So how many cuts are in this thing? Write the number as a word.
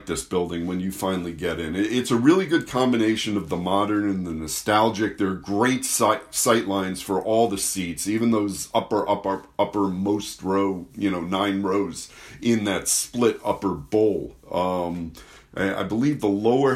zero